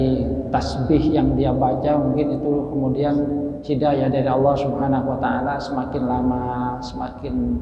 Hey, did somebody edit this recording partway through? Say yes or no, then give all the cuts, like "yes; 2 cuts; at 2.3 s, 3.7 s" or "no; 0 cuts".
no; 0 cuts